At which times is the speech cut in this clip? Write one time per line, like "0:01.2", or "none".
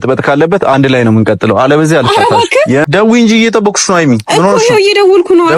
0:02.8

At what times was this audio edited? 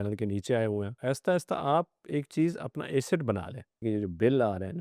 0:00.9
0:03.8

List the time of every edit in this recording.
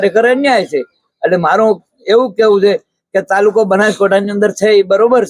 none

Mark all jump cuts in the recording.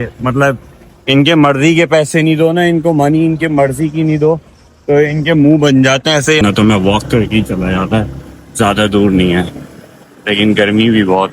0:06.4

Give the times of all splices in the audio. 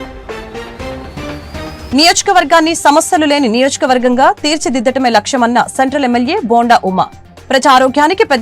none

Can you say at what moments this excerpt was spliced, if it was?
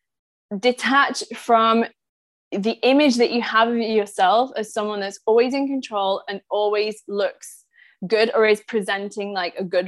none

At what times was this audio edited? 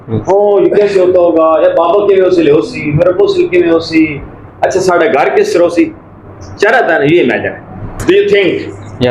0:08.0

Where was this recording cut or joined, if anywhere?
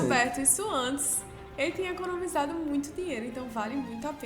none

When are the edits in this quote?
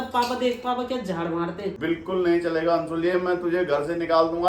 0:01.8

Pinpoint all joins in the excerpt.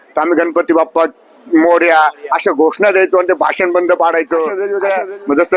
0:04.6

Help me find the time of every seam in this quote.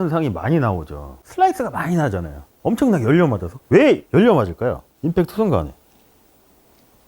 0:01.2

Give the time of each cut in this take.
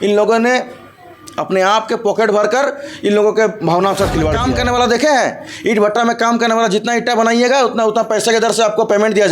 0:04.4

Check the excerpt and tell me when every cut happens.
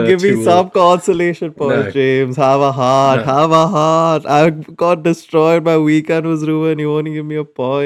none

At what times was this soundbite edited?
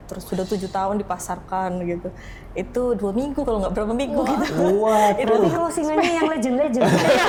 none

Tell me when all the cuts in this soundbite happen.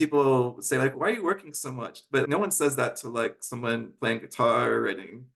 0:01.0
0:02.3

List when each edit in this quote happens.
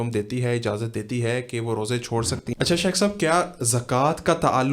0:02.4

